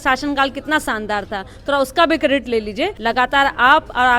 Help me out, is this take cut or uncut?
cut